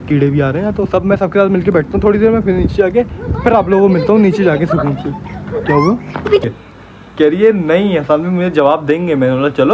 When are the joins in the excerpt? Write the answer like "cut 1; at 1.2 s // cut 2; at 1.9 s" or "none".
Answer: cut 1; at 6.4 s